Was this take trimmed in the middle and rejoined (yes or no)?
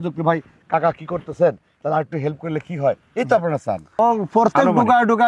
yes